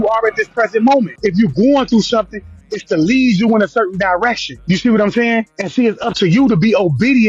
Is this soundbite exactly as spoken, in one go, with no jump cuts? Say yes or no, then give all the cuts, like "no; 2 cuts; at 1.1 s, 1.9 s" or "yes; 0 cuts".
no; 3 cuts; at 1.1 s, 4.5 s, 5.6 s